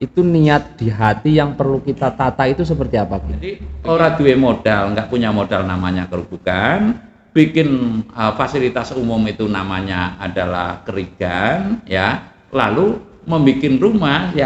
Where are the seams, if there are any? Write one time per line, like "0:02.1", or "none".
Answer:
0:03.7